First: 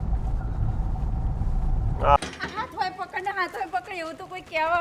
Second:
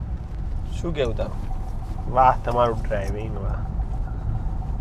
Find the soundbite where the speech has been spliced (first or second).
first